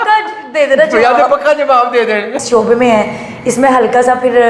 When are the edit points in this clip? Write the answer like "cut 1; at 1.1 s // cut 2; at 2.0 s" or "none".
cut 1; at 2.4 s